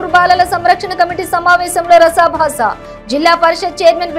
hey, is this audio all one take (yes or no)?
yes